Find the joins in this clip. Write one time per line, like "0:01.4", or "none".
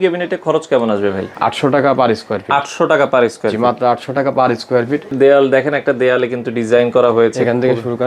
0:01.3
0:05.1